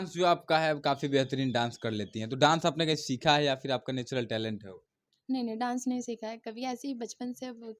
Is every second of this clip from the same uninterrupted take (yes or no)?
yes